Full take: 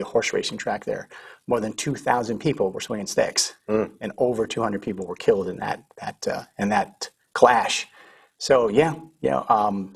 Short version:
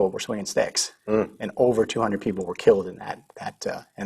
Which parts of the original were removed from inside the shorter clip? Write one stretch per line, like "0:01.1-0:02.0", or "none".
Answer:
none